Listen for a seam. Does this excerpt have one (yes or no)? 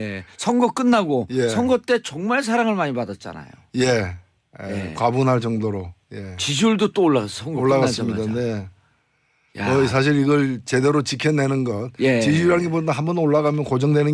no